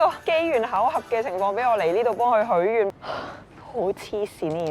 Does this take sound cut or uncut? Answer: cut